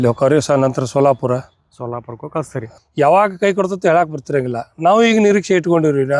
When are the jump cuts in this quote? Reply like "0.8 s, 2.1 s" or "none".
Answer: 2.6 s